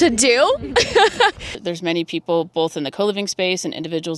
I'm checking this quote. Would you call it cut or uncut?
cut